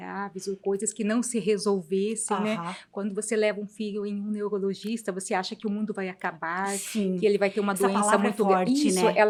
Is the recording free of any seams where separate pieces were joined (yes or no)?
yes